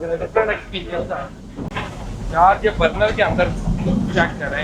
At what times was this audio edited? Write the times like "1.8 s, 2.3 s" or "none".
1.8 s